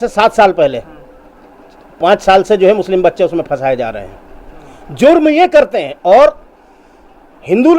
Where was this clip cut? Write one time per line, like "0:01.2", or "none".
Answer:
none

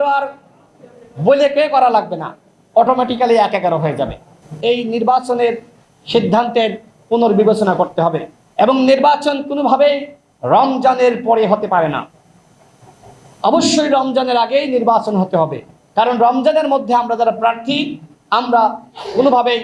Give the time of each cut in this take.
0:04.5

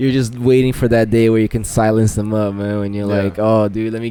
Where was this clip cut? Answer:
none

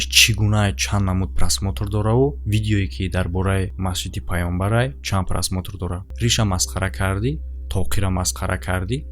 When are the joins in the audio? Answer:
0:06.1

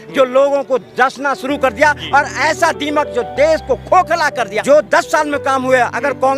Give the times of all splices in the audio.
0:04.6

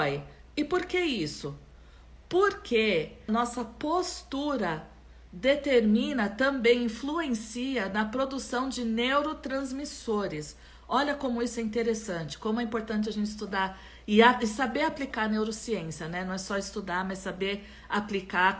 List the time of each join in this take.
0:03.2

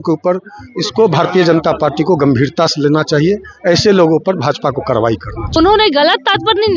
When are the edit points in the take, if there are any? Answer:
0:05.6

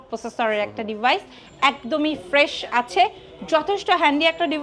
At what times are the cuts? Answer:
0:01.4

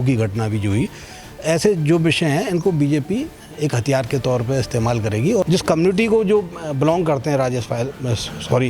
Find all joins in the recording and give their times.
0:05.4

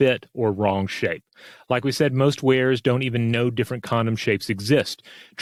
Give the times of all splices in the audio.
none

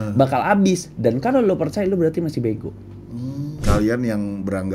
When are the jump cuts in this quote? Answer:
0:03.5

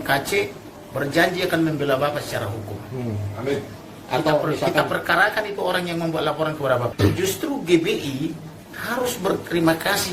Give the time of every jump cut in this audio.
0:06.9

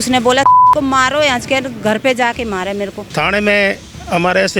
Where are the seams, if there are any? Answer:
0:03.0

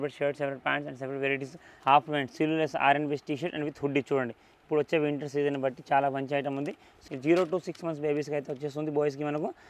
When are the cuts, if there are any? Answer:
0:01.7
0:06.9

